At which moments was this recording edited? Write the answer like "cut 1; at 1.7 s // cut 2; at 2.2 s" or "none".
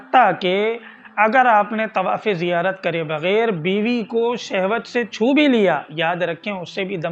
none